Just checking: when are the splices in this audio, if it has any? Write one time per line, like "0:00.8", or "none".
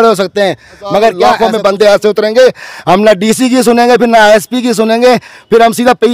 0:01.4